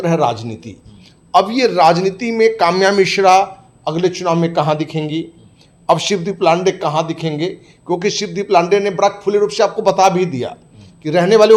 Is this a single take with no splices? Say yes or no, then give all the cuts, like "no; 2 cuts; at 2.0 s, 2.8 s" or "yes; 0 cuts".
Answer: yes; 0 cuts